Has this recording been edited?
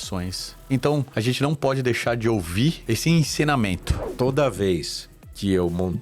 yes; 3 cuts; at 1.1 s, 2.8 s, 4.0 s

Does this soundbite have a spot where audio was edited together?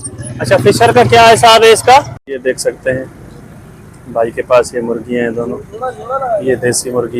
yes; 1 cut; at 2.2 s

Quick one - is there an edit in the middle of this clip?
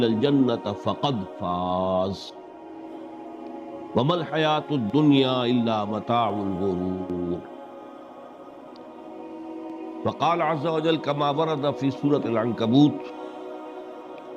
no; 0 cuts

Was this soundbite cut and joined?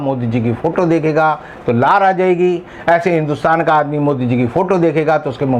no; 0 cuts

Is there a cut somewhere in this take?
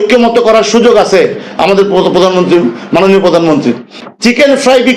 yes; 1 cut; at 4.0 s

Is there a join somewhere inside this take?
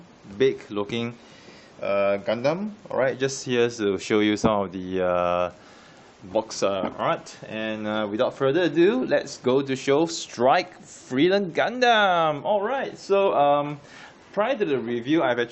no; 0 cuts

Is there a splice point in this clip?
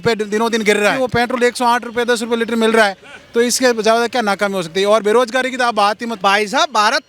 yes; 2 cuts; at 1.0 s, 6.1 s

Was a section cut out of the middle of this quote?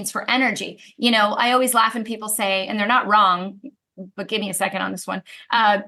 no; 0 cuts

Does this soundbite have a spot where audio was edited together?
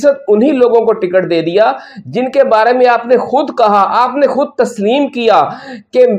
no; 0 cuts

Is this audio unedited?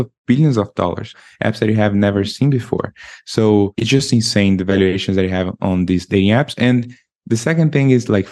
no; 2 cuts; at 1.1 s, 3.8 s

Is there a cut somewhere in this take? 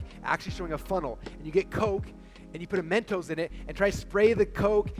no; 0 cuts

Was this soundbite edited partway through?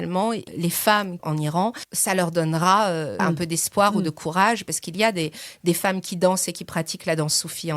yes; 2 cuts; at 1.4 s, 3.2 s

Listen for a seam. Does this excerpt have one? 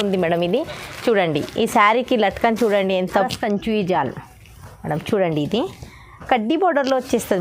yes; 1 cut; at 3.3 s

